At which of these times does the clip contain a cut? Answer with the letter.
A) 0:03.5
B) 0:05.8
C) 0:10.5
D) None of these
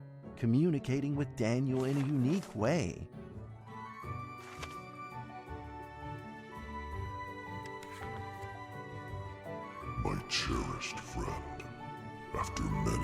D